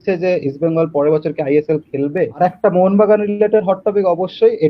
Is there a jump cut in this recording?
yes; 1 cut; at 2.4 s

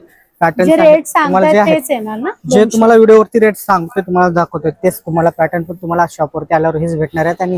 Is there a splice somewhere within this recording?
no; 0 cuts

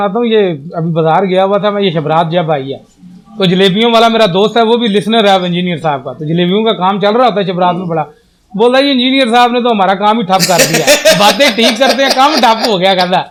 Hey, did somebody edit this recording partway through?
no; 0 cuts

